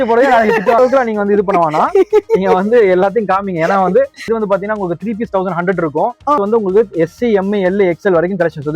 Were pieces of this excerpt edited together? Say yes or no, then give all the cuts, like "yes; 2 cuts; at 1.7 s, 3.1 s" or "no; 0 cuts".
yes; 3 cuts; at 0.8 s, 4.3 s, 6.4 s